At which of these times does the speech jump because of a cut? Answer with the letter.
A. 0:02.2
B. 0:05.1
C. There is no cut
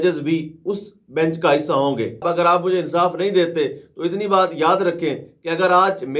A